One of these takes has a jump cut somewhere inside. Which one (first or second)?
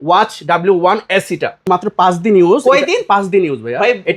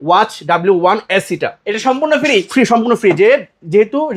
first